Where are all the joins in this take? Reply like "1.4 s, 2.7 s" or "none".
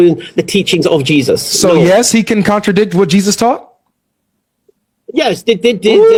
none